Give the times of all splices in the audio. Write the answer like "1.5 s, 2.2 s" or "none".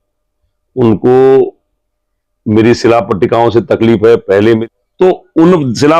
4.6 s